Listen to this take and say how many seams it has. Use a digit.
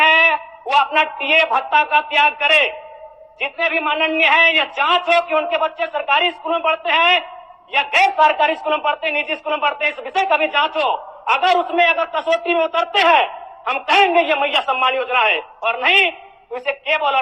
0